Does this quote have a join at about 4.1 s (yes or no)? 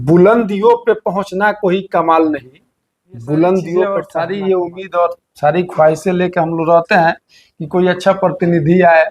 yes